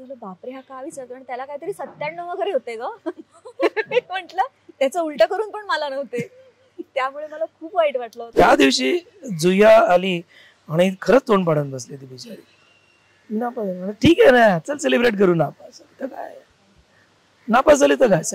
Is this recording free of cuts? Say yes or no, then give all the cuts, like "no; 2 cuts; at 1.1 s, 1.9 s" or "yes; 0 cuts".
no; 1 cut; at 8.2 s